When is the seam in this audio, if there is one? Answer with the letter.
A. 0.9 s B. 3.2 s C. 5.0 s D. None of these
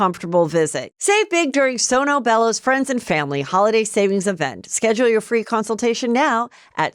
A